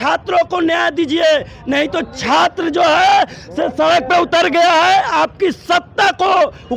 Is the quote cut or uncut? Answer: uncut